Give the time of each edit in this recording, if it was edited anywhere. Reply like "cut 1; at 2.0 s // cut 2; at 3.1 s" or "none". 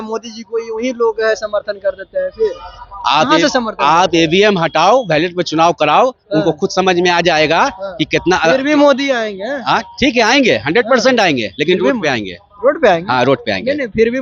none